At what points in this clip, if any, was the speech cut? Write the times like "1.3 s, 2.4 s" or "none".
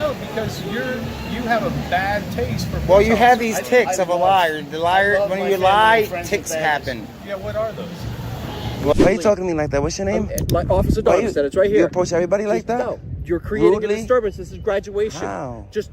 8.9 s